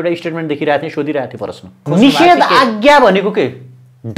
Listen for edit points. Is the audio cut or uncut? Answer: cut